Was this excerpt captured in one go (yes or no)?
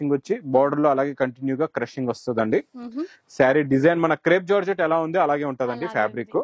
yes